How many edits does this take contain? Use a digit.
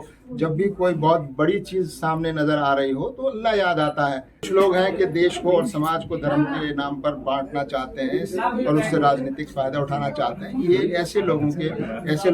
1